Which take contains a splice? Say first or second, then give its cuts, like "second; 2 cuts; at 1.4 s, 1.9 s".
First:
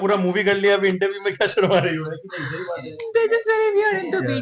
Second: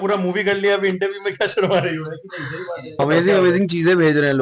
second; 1 cut; at 3.0 s